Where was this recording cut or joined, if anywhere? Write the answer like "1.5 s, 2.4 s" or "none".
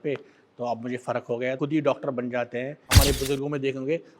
1.6 s, 2.9 s